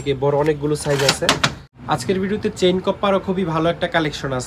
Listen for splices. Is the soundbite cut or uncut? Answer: cut